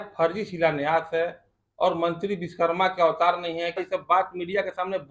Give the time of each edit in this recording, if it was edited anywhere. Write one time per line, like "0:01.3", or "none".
0:03.8